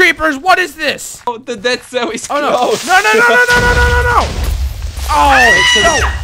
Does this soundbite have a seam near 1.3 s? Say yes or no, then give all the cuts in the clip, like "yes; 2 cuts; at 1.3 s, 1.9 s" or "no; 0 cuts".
yes; 1 cut; at 1.3 s